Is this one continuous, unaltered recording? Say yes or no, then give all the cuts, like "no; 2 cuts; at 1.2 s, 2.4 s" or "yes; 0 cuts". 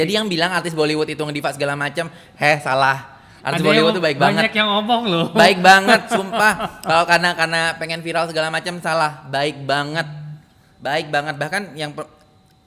yes; 0 cuts